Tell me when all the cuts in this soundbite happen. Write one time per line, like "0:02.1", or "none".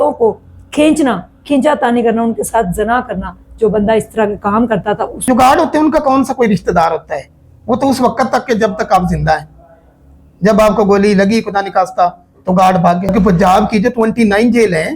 0:05.2
0:13.1